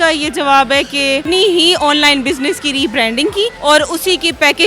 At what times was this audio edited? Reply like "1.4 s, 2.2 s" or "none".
1.2 s, 3.6 s